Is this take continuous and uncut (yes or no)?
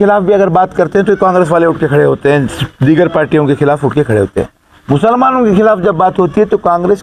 yes